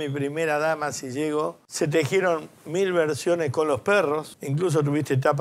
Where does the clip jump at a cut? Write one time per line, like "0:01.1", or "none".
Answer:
0:01.6
0:04.4

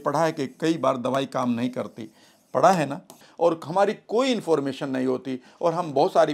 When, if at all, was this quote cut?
0:03.2

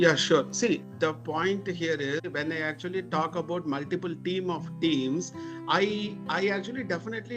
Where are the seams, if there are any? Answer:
0:00.8
0:02.2

